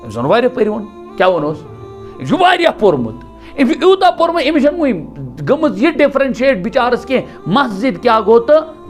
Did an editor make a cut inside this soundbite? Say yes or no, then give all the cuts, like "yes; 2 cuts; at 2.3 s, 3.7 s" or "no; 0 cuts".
no; 0 cuts